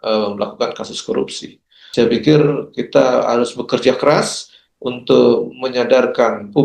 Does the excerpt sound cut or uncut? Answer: cut